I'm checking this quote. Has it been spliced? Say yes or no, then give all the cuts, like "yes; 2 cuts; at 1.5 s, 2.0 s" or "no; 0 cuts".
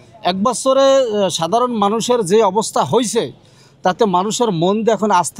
no; 0 cuts